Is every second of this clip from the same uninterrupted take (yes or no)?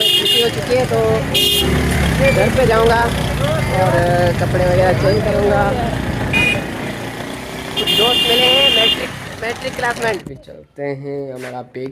no